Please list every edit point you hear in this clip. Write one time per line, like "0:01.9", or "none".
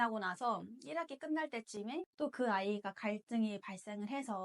0:02.1